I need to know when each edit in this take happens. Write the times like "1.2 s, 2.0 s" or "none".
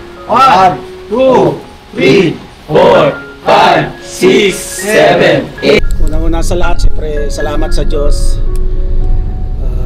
5.8 s

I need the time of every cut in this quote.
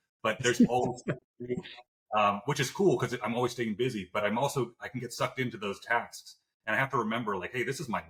none

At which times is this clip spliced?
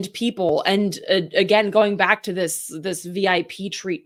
none

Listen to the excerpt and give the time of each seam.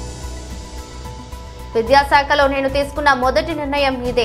1.0 s

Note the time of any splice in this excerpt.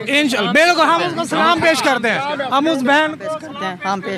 none

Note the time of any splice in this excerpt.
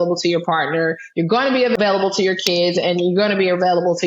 1.8 s

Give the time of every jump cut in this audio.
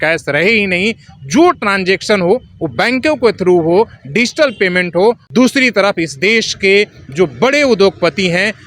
5.2 s

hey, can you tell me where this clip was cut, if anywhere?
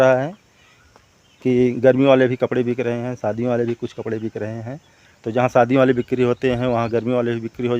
none

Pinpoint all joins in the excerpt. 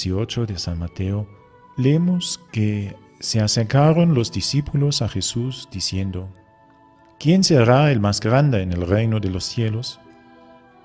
9.9 s

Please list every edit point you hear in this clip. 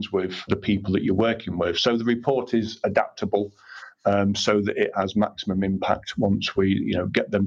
none

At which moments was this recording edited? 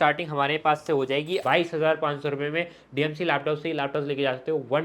1.4 s

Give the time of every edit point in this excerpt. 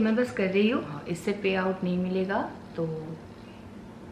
0.9 s

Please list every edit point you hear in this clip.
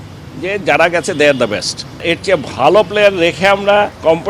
2.0 s

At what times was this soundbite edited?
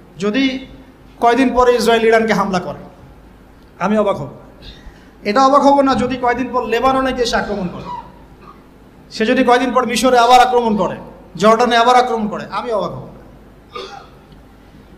none

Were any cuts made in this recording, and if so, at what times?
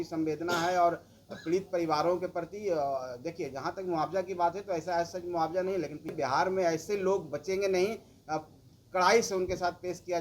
6.1 s

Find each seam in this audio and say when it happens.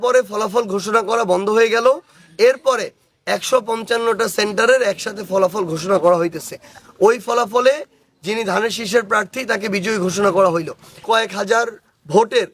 11.0 s

